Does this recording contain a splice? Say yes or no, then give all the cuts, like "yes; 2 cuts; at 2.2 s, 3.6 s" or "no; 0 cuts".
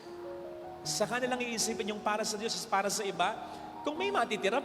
no; 0 cuts